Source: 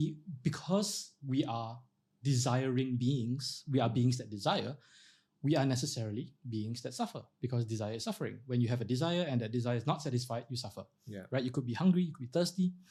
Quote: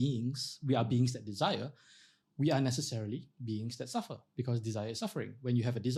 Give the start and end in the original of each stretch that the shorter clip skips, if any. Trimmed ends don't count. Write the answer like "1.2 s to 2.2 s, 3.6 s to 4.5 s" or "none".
none

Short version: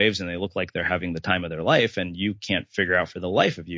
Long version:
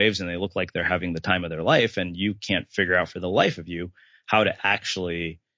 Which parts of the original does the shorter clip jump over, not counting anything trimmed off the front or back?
none

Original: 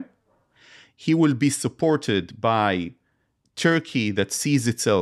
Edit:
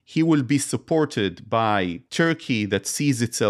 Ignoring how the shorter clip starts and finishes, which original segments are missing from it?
2.9 s to 3.5 s

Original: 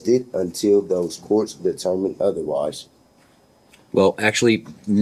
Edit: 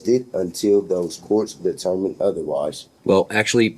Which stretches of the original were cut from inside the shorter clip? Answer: 2.9 s to 3.7 s

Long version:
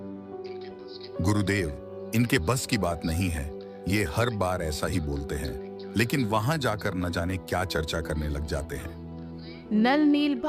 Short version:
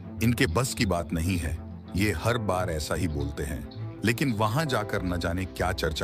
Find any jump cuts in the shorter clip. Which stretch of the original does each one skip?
none

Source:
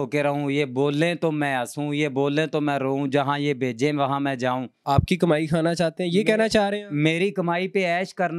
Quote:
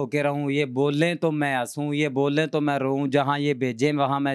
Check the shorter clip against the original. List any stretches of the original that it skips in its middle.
none

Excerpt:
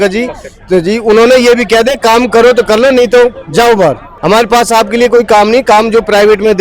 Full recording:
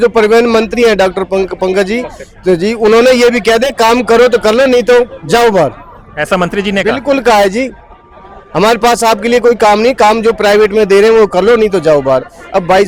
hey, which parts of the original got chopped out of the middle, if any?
5.8 s to 8.4 s

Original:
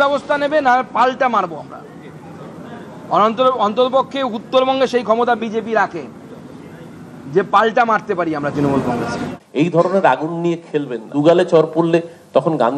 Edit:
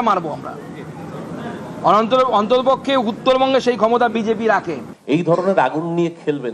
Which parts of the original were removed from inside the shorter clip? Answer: 6.2 s to 9.4 s

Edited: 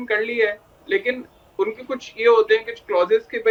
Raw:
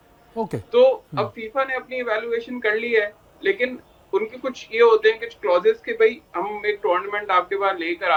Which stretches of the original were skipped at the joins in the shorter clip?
none

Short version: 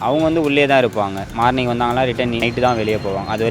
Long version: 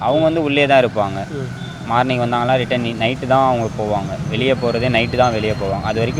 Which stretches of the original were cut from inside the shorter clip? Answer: 1.2 s to 1.7 s, 3.0 s to 5.0 s

